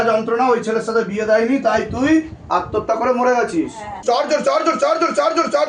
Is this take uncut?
no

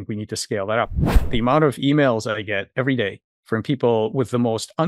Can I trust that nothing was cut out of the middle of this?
no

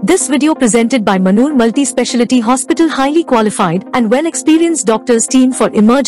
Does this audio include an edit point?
no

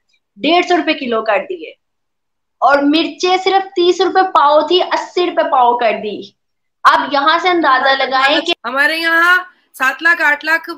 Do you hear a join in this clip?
yes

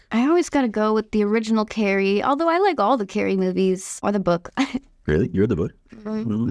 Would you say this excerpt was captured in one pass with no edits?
no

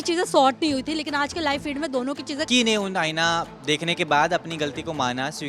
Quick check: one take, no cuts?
no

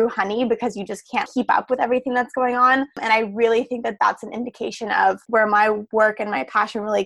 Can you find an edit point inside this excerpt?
yes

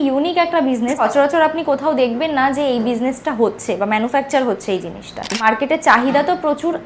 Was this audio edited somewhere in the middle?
yes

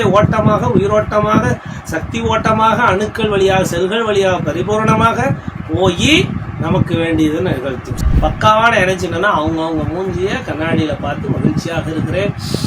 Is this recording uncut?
no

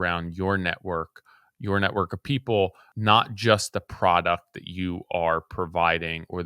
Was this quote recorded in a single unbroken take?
no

